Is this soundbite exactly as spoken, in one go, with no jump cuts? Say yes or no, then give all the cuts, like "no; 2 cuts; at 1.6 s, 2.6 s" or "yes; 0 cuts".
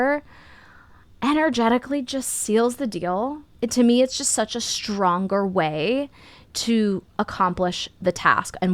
yes; 0 cuts